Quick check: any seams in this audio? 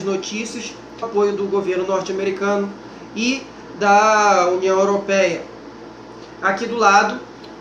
no; 0 cuts

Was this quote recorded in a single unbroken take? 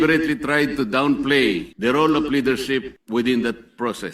no; 2 cuts; at 1.7 s, 3.0 s

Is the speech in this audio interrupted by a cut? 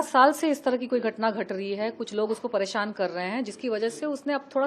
no; 0 cuts

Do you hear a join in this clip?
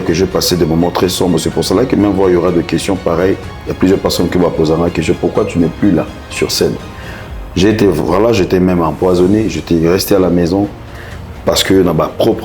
yes; 1 cut; at 3.5 s

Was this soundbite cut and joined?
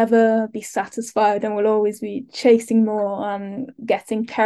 no; 0 cuts

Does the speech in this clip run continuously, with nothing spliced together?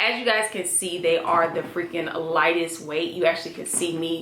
yes; 0 cuts

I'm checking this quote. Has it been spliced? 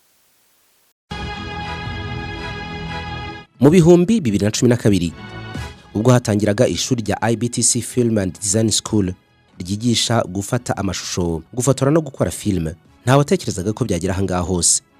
yes; 1 cut; at 1.0 s

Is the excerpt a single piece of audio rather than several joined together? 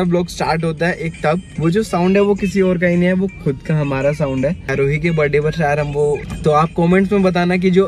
no; 3 cuts; at 1.5 s, 4.7 s, 6.3 s

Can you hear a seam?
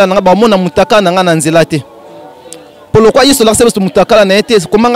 no; 0 cuts

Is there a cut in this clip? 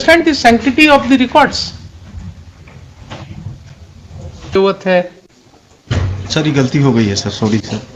yes; 1 cut; at 4.6 s

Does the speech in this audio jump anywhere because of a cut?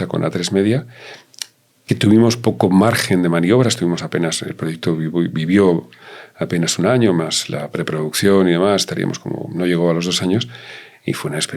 no; 0 cuts

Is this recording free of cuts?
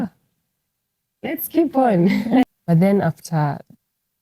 no; 1 cut; at 2.4 s

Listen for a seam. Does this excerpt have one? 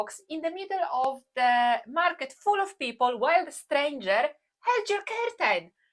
no; 0 cuts

